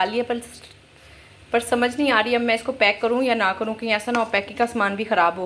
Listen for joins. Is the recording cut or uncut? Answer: uncut